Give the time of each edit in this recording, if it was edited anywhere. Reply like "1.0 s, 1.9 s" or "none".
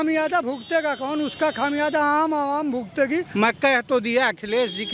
3.3 s

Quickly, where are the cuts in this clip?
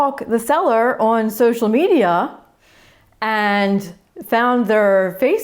none

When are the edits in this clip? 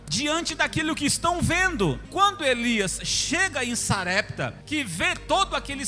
2.1 s, 4.6 s

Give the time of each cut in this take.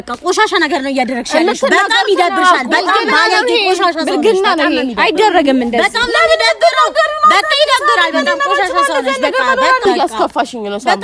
9.8 s

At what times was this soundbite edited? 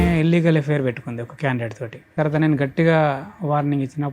2.1 s

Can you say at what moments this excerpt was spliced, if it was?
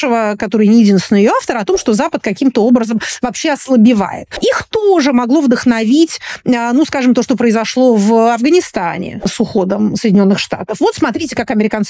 4.2 s, 9.3 s

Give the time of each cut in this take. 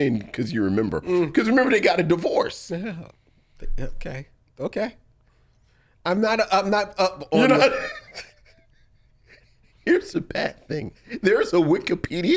none

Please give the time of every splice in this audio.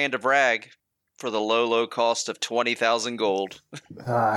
1.3 s

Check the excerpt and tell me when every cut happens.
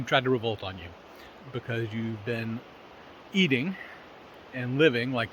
none

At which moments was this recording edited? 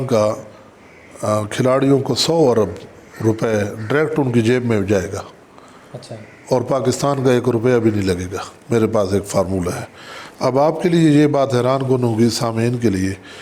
none

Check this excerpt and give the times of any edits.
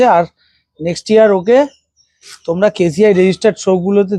none

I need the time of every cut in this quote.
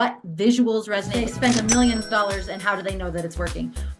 1.1 s

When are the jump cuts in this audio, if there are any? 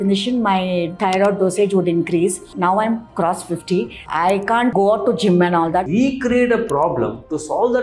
0.9 s, 2.5 s, 4.7 s, 5.9 s

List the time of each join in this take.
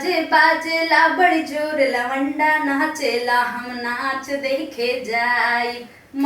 none

